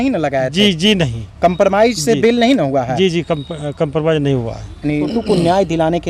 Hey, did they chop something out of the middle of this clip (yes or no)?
yes